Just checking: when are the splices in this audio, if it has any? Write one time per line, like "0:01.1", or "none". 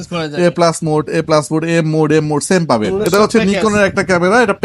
0:02.9